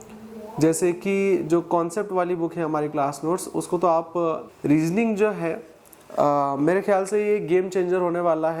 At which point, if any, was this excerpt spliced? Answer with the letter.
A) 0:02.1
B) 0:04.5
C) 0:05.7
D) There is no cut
B